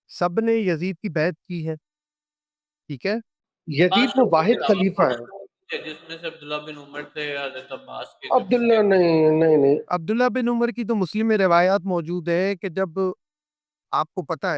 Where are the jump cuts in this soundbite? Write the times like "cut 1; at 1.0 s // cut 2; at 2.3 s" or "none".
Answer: none